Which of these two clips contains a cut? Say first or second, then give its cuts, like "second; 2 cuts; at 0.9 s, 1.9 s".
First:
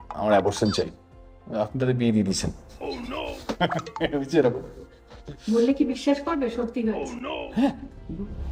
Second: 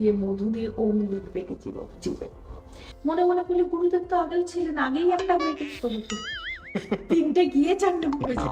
second; 1 cut; at 2.8 s